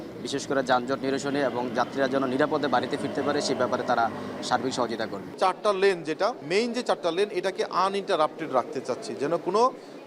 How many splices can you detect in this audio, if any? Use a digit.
2